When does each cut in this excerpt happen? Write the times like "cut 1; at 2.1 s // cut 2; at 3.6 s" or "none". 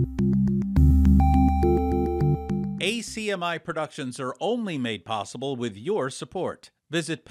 cut 1; at 2.6 s